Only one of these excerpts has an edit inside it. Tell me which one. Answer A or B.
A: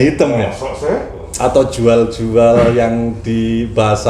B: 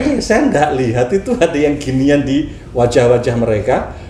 A